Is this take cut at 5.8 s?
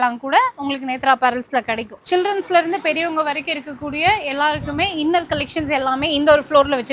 no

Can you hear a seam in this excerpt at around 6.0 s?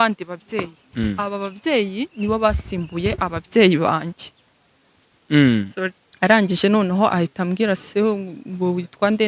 yes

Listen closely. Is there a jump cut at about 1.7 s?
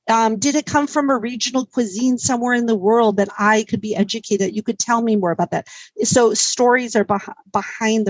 no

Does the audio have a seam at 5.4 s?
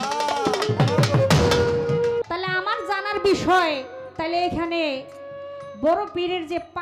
no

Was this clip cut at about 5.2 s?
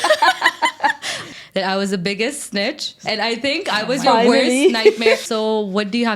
yes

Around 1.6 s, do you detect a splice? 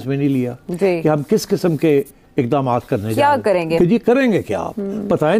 no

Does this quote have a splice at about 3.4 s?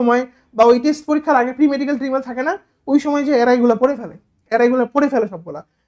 no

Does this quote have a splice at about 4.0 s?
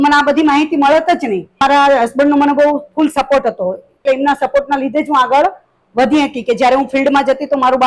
yes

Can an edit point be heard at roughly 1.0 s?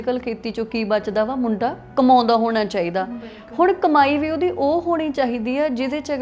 no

